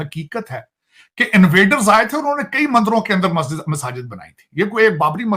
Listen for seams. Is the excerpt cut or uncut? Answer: uncut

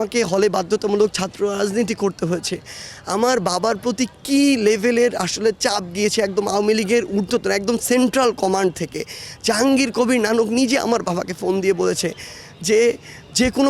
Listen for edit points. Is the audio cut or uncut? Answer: uncut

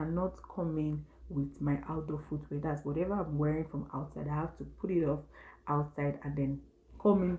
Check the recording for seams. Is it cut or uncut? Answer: uncut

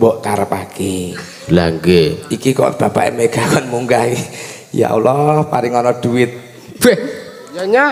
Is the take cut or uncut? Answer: uncut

